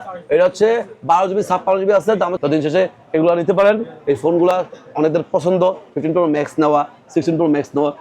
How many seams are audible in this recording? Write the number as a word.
one